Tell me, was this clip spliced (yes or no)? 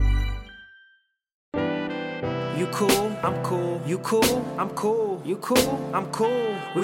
yes